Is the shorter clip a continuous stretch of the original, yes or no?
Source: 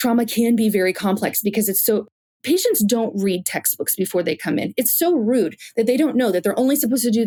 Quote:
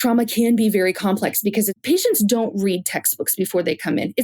no